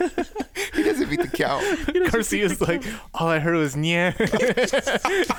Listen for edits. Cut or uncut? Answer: uncut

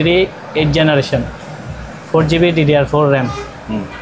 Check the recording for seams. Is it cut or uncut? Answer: uncut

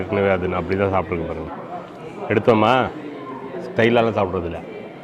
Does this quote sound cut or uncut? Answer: uncut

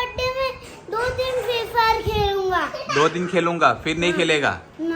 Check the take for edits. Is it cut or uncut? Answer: uncut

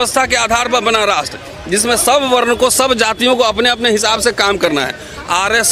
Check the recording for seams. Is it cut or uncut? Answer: uncut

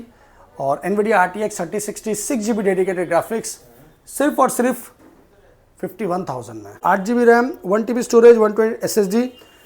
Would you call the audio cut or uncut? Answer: cut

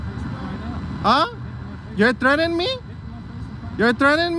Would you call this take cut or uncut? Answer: uncut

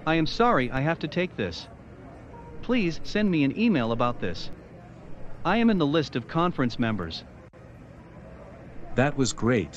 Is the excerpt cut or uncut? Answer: cut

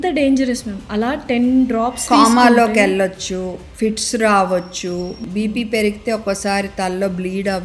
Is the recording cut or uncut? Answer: cut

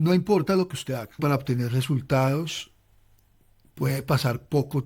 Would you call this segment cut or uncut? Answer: cut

